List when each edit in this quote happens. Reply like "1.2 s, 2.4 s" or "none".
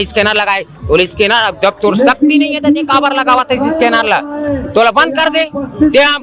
none